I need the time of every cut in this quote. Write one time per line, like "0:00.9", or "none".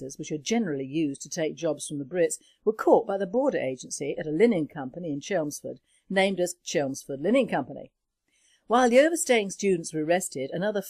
0:07.2